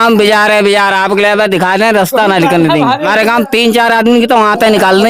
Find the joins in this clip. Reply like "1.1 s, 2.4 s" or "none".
3.1 s